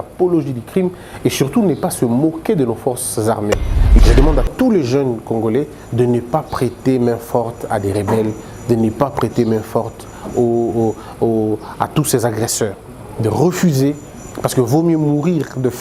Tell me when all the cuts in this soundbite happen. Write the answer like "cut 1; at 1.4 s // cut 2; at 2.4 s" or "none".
cut 1; at 4.0 s